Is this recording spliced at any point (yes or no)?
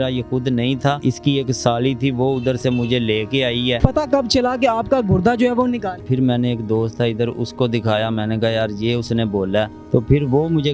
yes